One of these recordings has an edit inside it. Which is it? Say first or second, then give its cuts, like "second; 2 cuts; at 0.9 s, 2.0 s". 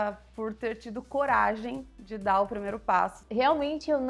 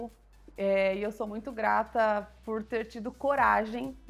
first; 1 cut; at 3.2 s